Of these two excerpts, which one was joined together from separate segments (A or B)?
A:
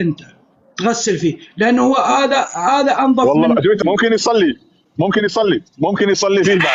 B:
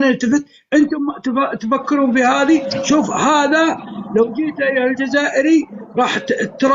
A